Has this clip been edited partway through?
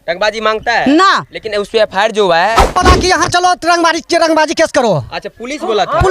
yes; 1 cut; at 2.6 s

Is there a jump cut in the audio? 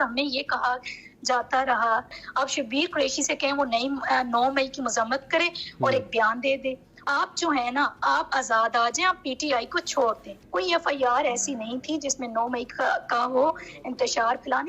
yes; 3 cuts; at 2.2 s, 7.0 s, 10.3 s

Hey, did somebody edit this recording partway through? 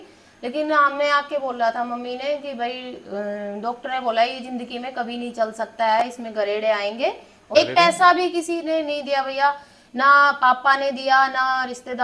yes; 1 cut; at 7.5 s

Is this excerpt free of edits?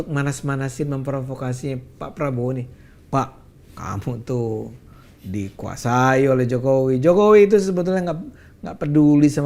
yes; 0 cuts

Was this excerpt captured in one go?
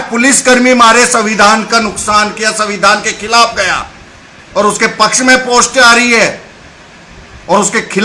yes; 0 cuts

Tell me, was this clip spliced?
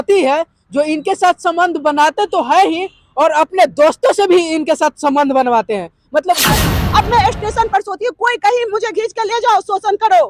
yes; 1 cut; at 6.5 s

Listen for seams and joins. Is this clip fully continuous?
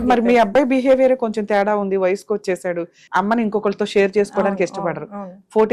no; 1 cut; at 3.0 s

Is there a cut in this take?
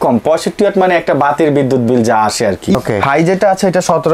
yes; 1 cut; at 2.8 s

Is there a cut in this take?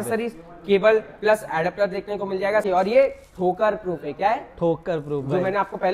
yes; 1 cut; at 2.6 s

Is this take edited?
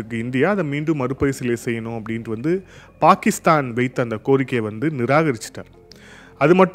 no; 0 cuts

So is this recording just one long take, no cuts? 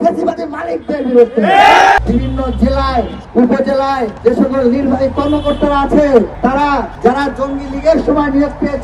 no; 4 cuts; at 2.0 s, 3.2 s, 4.1 s, 6.6 s

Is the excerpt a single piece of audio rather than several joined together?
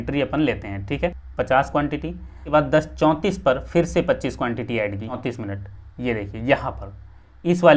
no; 3 cuts; at 1.2 s, 2.4 s, 5.2 s

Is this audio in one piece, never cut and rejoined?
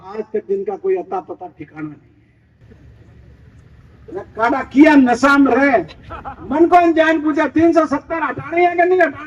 no; 1 cut; at 2.6 s

